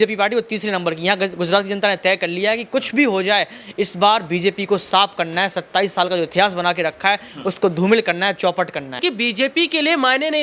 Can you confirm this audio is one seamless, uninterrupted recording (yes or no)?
no